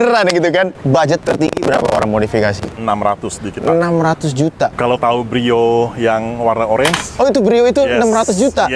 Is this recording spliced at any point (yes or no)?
yes